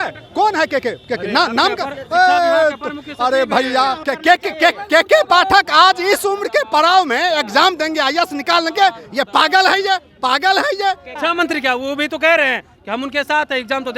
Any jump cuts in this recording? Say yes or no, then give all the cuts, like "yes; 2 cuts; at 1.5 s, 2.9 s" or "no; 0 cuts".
yes; 2 cuts; at 4.1 s, 11.1 s